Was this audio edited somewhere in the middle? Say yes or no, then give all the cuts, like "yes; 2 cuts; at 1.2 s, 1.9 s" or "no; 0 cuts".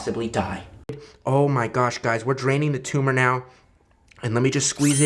yes; 1 cut; at 1.0 s